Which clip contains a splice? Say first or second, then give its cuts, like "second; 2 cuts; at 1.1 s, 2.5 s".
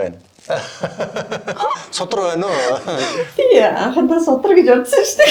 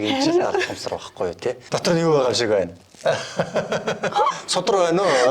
second; 1 cut; at 1.6 s